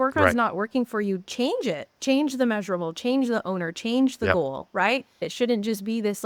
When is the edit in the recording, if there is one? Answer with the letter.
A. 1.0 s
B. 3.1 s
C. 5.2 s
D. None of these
C